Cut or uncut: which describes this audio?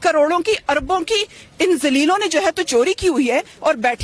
uncut